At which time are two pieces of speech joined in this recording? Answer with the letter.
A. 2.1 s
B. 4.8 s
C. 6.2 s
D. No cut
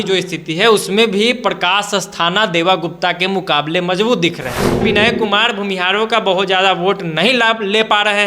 B